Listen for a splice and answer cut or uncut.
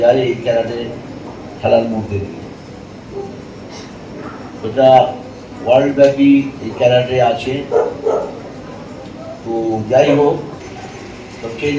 cut